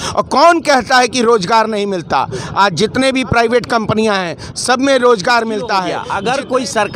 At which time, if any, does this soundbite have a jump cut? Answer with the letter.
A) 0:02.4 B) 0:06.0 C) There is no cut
B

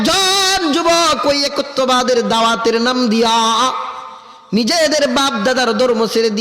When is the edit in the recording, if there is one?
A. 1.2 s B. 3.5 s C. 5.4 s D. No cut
D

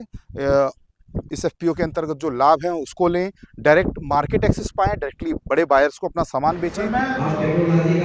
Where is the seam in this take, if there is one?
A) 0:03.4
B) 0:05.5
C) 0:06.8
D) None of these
C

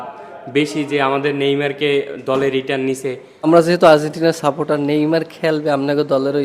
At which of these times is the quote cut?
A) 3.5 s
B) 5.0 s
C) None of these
A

